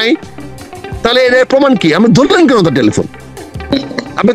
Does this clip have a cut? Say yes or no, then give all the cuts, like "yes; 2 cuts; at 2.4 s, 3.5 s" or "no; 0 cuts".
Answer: no; 0 cuts